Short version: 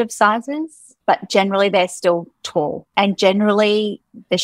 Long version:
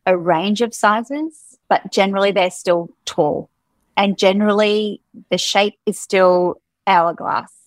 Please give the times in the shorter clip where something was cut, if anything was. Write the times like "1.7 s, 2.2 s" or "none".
2.8 s